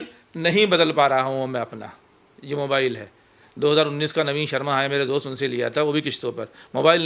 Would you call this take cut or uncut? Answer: uncut